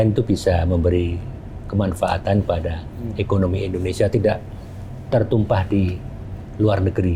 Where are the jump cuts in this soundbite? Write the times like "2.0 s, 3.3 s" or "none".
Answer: none